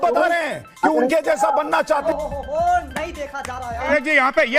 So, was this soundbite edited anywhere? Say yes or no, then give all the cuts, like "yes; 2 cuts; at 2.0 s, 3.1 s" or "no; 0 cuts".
yes; 2 cuts; at 2.0 s, 3.9 s